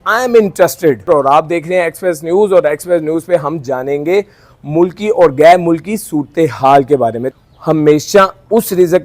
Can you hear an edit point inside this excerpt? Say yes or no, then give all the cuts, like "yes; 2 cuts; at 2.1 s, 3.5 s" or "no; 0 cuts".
yes; 2 cuts; at 1.1 s, 7.2 s